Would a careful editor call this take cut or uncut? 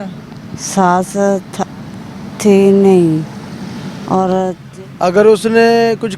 cut